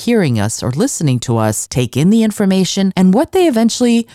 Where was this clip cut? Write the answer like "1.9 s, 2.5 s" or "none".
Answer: 1.6 s, 2.9 s